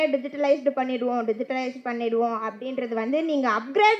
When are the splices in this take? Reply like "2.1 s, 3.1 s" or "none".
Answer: none